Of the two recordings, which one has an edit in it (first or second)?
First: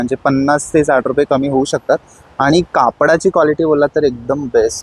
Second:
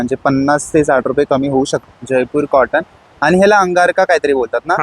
second